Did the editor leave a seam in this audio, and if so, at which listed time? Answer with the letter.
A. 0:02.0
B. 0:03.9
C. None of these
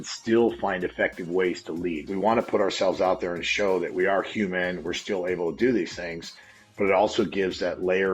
A